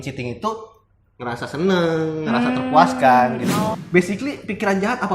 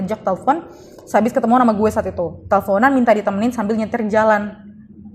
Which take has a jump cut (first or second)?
first